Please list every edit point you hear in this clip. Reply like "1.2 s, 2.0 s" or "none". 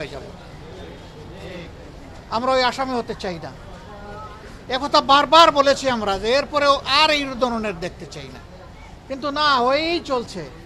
none

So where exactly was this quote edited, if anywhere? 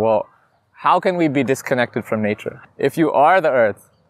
2.5 s

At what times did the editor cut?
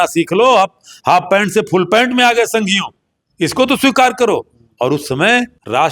none

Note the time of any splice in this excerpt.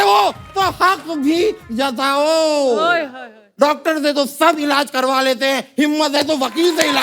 none

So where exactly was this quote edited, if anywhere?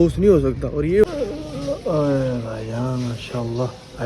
1.0 s

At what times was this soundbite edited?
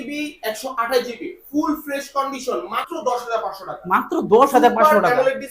2.9 s

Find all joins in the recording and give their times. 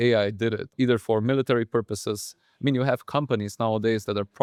none

